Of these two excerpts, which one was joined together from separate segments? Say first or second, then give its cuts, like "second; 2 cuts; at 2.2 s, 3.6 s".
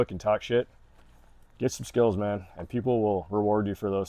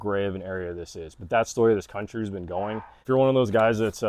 second; 1 cut; at 3.0 s